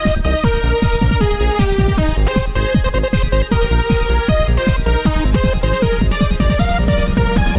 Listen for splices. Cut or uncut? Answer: cut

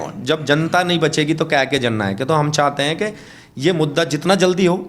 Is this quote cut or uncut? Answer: uncut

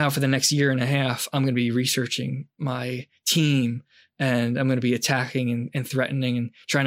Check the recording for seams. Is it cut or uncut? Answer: uncut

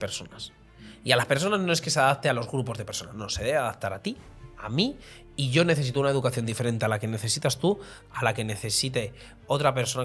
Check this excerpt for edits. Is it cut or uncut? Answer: uncut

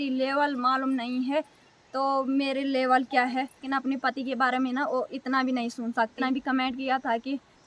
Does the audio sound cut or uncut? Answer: cut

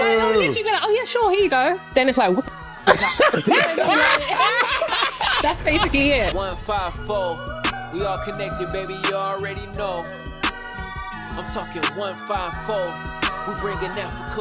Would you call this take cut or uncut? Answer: cut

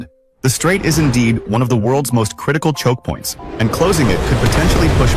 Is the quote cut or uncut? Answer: uncut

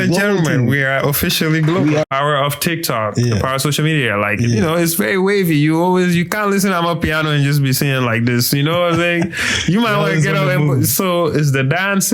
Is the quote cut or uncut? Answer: cut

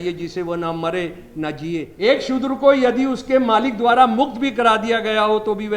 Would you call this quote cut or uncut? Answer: cut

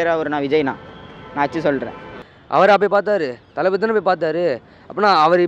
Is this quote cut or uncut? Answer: cut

